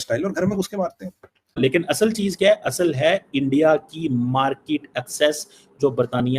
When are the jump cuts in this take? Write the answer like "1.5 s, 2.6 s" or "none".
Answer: 1.4 s